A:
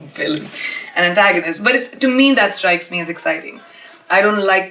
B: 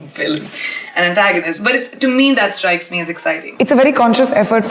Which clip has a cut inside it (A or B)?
B